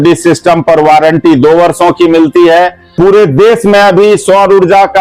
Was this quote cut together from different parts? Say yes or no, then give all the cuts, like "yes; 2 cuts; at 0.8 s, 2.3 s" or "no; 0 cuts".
yes; 1 cut; at 2.8 s